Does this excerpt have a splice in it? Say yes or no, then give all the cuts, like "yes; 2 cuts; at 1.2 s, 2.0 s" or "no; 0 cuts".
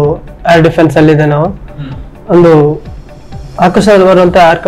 no; 0 cuts